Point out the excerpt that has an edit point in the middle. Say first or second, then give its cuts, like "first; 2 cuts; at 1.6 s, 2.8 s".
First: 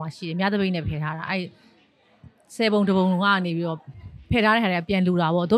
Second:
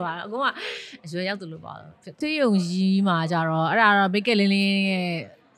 second; 1 cut; at 2.2 s